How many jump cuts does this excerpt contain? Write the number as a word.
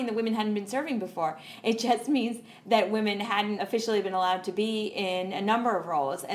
one